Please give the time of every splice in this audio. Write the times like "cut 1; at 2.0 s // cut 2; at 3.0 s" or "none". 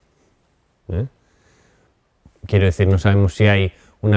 cut 1; at 2.0 s